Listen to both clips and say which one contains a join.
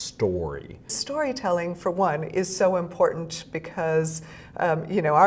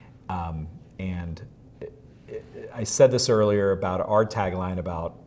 first; 1 cut; at 1.0 s

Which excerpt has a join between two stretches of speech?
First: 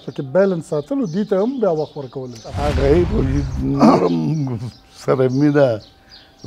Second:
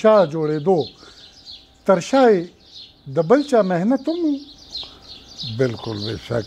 first; 1 cut; at 2.5 s

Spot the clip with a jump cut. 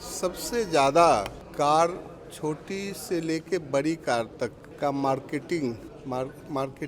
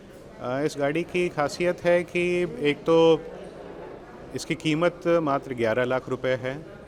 first; 3 cuts; at 1.4 s, 4.6 s, 5.9 s

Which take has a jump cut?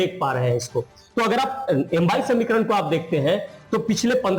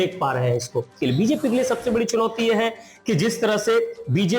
second; 1 cut; at 0.9 s

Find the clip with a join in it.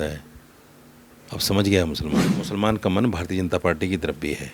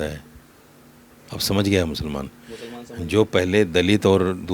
first; 1 cut; at 2.4 s

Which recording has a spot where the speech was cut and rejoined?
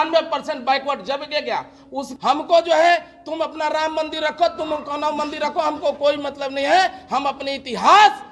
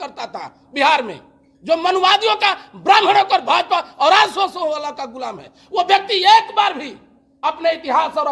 first; 1 cut; at 2.1 s

